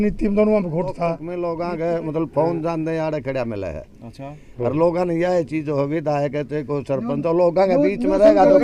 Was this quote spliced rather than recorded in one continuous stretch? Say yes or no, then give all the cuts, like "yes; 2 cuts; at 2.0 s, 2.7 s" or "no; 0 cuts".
yes; 1 cut; at 1.3 s